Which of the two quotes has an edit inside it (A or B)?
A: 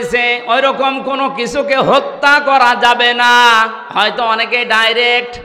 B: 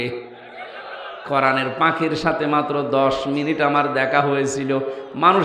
B